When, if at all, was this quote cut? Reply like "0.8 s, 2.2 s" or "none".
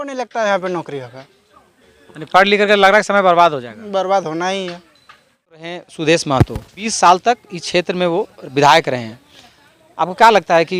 5.7 s, 6.8 s